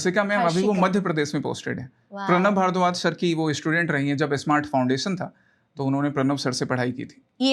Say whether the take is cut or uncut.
uncut